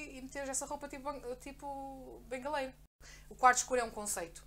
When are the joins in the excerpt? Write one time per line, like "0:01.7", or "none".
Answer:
0:02.9